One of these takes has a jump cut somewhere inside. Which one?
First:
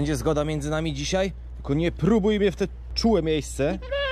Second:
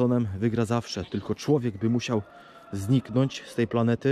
first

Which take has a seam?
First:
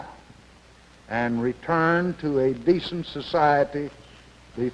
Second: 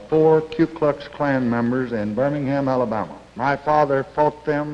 second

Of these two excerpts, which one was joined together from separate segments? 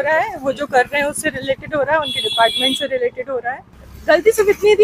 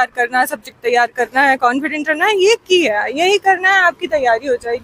first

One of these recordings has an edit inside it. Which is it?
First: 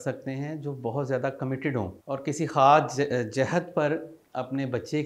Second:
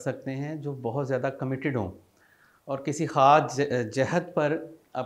first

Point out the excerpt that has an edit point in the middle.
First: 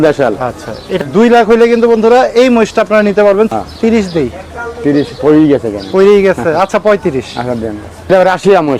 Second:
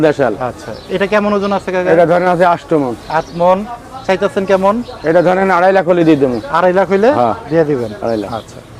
first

